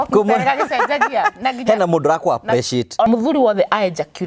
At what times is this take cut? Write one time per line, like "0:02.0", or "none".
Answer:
0:03.1